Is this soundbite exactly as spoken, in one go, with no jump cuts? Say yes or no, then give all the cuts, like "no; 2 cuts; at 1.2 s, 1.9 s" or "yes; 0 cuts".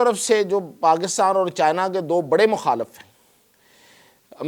yes; 0 cuts